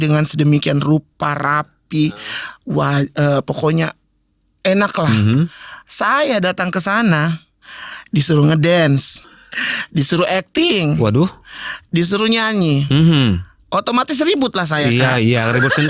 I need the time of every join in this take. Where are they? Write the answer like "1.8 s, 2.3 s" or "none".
9.2 s